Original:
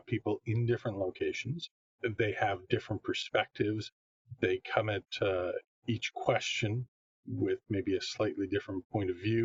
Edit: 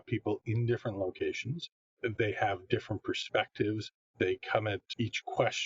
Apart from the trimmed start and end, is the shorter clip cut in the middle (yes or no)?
yes